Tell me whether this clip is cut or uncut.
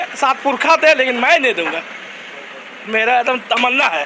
uncut